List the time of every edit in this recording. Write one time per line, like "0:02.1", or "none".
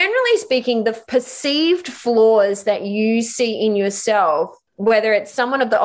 0:01.0
0:04.6

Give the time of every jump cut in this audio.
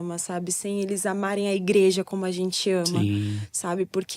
none

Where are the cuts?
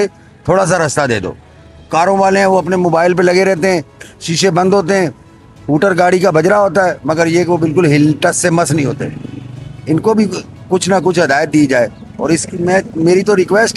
none

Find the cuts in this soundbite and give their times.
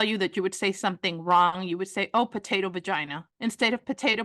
0:03.2

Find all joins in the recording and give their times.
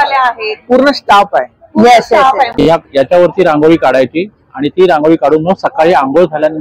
0:02.7

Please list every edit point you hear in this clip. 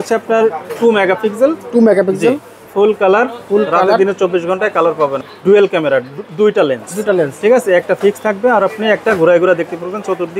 0:05.2

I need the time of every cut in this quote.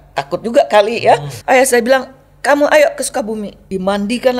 0:01.3
0:03.5

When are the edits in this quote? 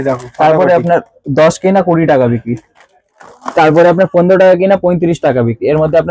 none

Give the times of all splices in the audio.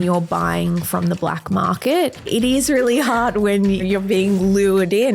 0:02.2
0:03.8

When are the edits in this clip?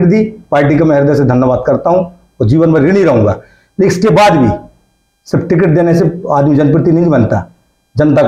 none

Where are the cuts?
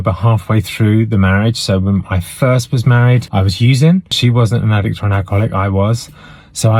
0:03.3
0:04.1

